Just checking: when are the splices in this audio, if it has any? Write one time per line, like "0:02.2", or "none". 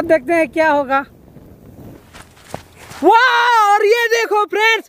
0:02.0